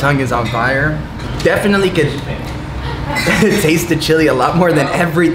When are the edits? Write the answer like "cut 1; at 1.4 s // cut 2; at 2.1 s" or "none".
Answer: cut 1; at 1.2 s